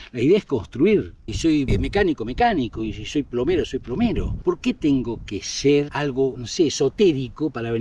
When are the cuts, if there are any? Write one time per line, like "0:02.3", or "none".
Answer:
0:01.3
0:04.3
0:06.3